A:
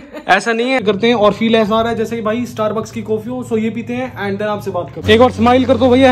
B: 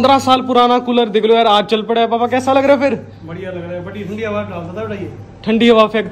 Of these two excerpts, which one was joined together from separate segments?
A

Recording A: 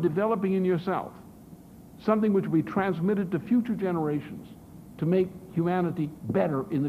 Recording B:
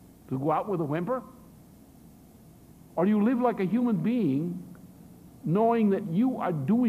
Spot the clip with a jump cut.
B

